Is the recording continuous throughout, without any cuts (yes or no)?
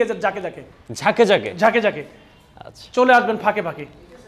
yes